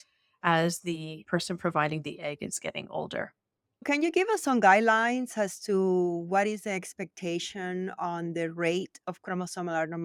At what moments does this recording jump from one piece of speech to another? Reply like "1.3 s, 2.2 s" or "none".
none